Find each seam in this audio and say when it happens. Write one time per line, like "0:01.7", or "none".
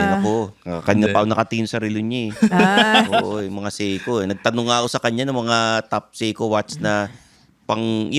none